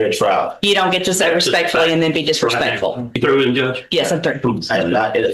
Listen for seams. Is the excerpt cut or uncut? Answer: cut